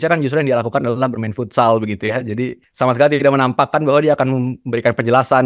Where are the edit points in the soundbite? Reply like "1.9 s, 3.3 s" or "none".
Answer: 2.6 s